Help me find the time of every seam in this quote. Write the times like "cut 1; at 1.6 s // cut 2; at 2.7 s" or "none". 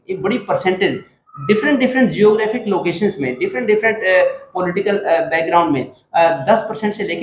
none